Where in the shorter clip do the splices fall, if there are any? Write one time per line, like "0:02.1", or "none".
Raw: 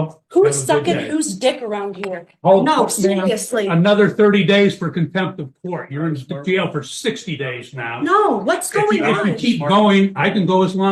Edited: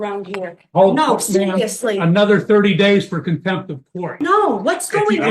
0:04.1

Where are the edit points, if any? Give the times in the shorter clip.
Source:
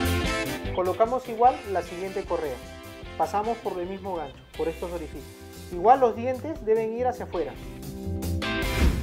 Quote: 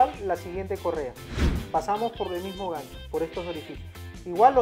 none

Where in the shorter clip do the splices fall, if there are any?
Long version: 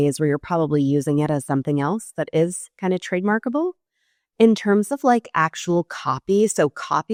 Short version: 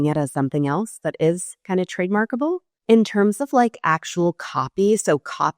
0:02.7

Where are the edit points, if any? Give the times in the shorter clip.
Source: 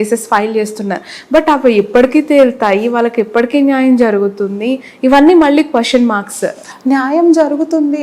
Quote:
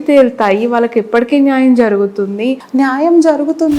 0:02.6

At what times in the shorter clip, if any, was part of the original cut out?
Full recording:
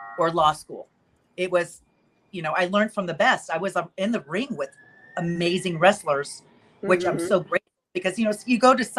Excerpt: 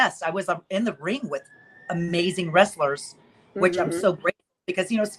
none

